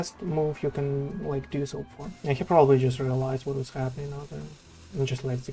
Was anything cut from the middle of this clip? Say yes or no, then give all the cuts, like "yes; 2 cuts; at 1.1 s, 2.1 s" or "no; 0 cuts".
yes; 1 cut; at 2.0 s